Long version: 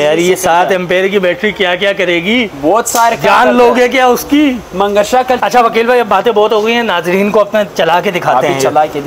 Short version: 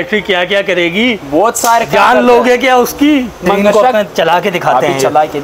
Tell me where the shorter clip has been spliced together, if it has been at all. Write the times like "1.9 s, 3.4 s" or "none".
3.7 s